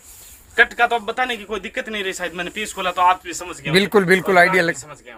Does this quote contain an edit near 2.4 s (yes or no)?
no